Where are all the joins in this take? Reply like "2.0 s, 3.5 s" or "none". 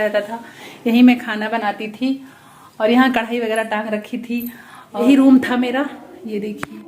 5.0 s